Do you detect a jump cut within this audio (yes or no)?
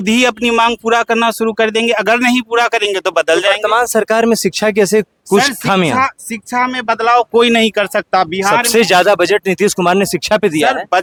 no